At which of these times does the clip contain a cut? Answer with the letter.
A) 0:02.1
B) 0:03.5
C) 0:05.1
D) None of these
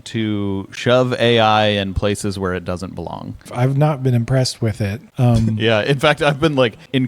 B